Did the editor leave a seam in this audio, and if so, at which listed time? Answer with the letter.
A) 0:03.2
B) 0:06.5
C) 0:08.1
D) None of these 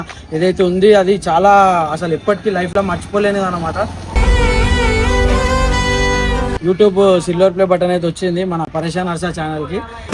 B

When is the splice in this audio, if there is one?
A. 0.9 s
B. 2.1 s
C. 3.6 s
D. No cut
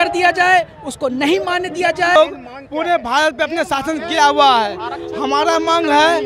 B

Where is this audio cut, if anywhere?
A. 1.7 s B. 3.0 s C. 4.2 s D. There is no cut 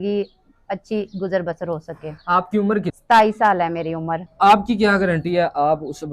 C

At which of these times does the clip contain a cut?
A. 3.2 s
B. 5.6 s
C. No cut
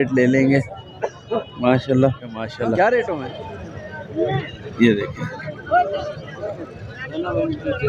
A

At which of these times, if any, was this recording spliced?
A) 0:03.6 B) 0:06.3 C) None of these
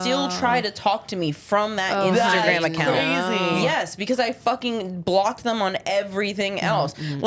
C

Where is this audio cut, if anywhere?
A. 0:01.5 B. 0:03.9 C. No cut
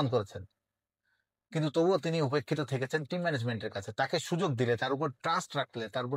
C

